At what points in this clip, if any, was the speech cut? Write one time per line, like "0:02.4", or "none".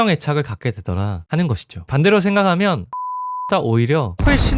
0:01.7